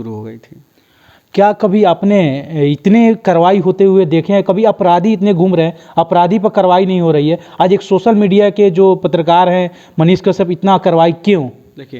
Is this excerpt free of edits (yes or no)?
yes